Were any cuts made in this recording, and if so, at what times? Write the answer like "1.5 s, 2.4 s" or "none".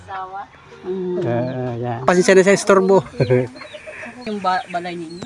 2.0 s, 4.1 s